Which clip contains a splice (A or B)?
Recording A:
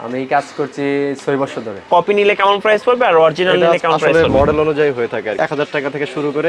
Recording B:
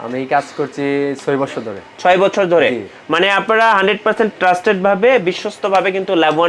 A